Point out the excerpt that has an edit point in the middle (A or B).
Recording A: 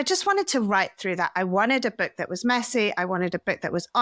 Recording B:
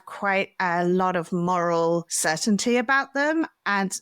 B